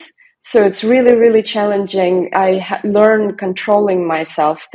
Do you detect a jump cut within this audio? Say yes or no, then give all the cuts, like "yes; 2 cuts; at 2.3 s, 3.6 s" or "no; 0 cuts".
yes; 1 cut; at 2.3 s